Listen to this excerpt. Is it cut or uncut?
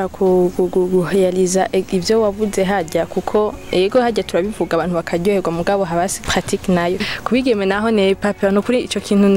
cut